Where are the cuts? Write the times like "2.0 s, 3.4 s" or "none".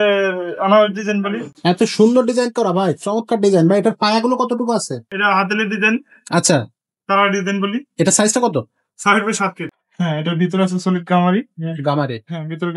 1.4 s, 5.1 s, 9.7 s